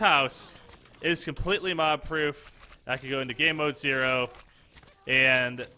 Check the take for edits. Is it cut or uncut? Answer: uncut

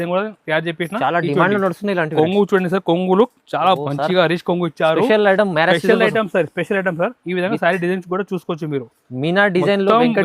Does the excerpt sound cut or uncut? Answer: cut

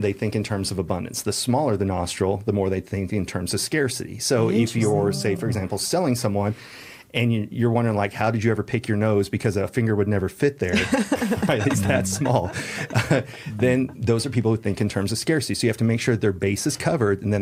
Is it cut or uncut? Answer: uncut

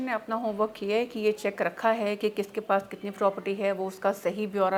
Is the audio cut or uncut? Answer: uncut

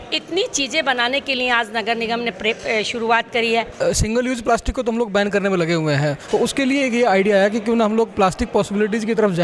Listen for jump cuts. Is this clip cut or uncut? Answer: cut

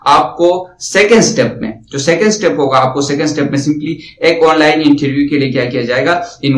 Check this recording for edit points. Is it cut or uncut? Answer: uncut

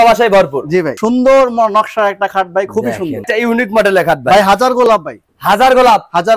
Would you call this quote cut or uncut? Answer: cut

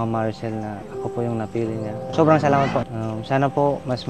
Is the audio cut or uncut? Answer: cut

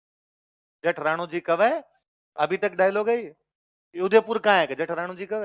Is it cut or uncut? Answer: uncut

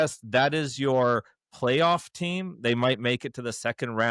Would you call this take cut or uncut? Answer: uncut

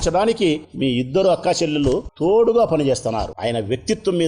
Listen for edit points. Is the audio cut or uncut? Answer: cut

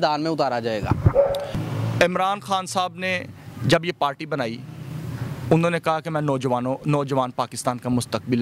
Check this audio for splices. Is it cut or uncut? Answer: uncut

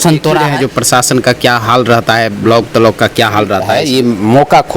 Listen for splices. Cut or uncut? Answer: cut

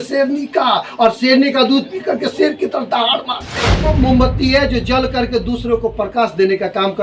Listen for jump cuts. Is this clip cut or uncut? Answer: cut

